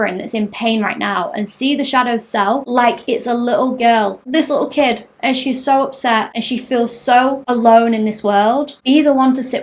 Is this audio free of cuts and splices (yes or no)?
no